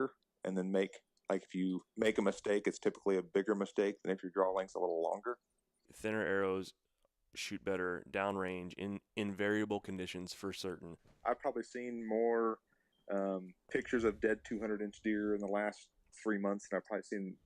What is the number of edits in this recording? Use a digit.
2